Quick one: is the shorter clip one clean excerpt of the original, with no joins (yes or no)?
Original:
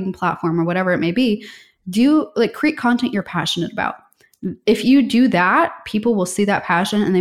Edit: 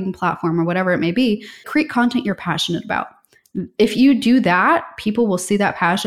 no